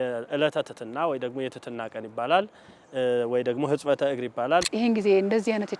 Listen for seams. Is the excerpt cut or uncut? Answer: cut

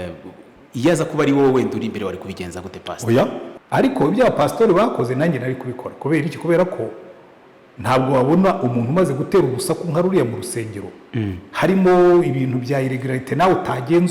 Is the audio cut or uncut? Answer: cut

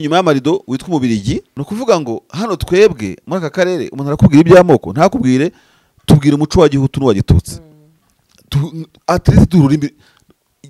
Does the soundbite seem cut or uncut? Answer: cut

